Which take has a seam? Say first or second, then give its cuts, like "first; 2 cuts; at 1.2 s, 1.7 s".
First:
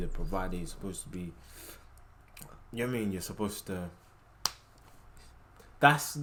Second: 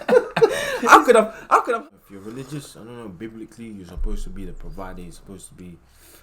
second; 1 cut; at 1.8 s